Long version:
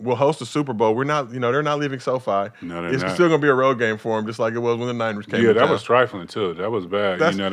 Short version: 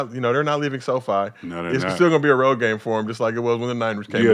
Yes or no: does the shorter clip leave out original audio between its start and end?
no